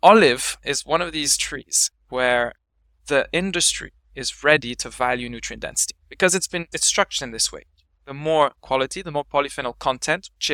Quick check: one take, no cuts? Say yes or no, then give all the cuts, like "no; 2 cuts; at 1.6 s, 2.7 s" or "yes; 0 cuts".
yes; 0 cuts